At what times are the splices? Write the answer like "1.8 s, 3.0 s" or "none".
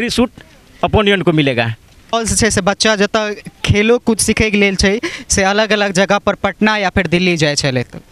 2.1 s